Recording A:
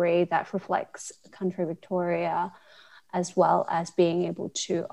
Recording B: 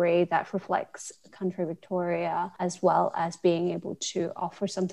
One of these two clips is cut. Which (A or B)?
B